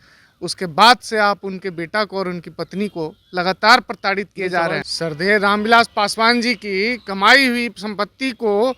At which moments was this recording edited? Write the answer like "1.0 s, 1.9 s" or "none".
4.8 s